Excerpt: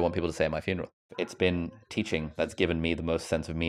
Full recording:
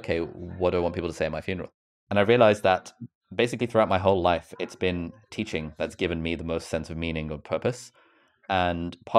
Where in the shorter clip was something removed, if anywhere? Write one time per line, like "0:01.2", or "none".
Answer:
0:01.1